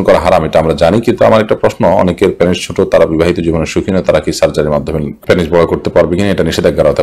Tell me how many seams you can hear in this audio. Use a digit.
0